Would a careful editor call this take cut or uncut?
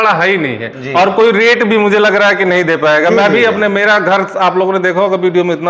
uncut